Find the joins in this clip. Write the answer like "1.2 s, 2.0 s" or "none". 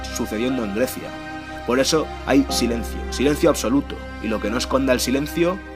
none